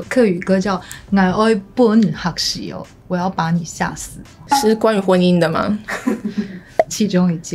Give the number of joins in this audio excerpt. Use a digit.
0